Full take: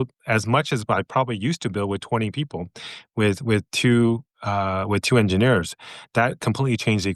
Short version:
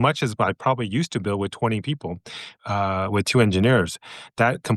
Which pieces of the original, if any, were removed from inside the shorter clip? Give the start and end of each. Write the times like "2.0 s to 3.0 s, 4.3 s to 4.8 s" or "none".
3.0 s to 4.3 s